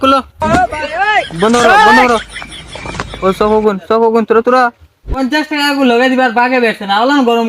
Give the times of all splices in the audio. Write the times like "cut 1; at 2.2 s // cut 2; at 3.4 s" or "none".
cut 1; at 5.1 s